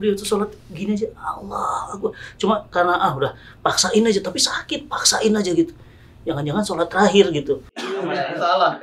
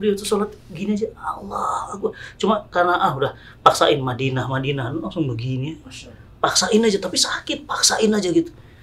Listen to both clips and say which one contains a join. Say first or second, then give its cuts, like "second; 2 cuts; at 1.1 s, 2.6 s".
first; 2 cuts; at 3.5 s, 7.9 s